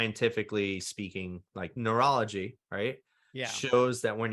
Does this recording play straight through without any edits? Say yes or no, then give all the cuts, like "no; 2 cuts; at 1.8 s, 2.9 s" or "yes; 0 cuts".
no; 1 cut; at 1.7 s